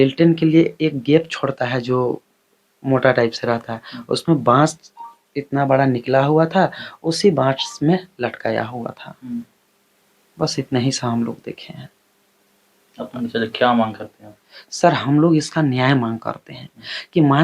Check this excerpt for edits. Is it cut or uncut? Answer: uncut